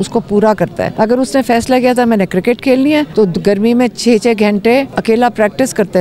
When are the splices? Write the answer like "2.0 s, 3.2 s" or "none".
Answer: 0.9 s, 3.1 s, 4.9 s